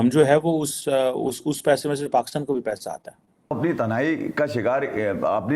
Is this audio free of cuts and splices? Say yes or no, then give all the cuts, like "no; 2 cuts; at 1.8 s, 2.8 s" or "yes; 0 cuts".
no; 1 cut; at 3.5 s